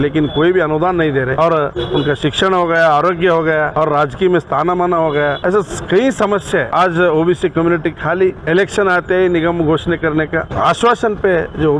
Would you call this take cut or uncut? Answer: cut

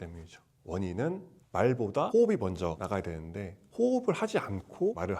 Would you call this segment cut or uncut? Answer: cut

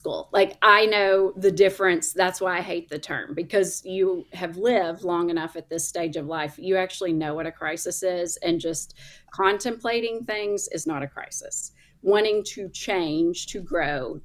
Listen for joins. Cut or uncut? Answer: uncut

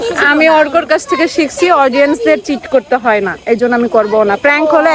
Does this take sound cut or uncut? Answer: uncut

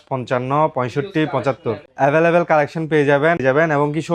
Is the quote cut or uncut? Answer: cut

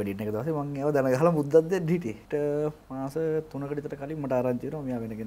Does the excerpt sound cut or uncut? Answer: cut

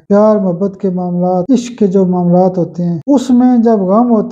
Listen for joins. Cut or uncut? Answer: cut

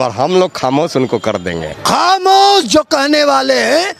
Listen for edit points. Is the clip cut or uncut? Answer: cut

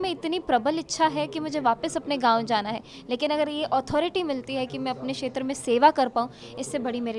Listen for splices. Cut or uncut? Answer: uncut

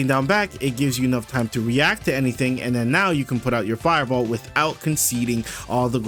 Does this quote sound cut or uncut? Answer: uncut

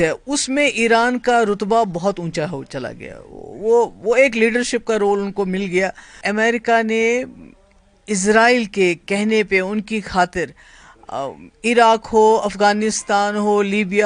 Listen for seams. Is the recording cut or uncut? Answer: cut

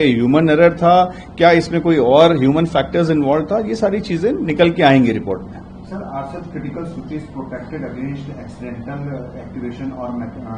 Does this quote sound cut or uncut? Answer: uncut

